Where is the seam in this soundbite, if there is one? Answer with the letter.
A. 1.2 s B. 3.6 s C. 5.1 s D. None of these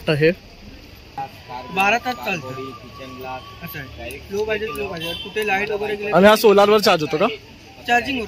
A